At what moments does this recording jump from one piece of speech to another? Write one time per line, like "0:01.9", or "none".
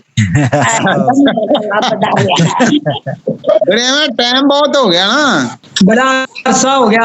0:05.6